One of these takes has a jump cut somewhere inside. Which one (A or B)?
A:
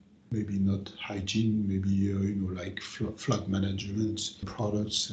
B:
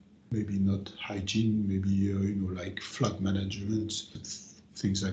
B